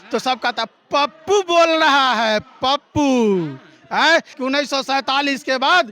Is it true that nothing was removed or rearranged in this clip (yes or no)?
no